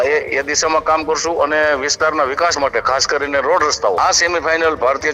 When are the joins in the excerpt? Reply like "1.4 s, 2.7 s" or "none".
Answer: 4.0 s